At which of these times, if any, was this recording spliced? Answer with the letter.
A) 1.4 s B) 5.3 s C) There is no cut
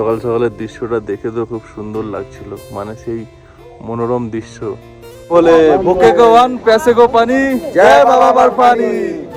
B